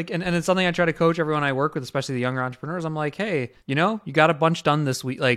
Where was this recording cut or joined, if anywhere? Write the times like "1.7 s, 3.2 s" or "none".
3.6 s